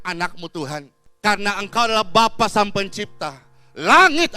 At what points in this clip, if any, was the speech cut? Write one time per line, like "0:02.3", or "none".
0:01.0